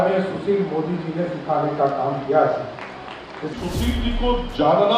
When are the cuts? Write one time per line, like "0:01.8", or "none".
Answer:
0:03.5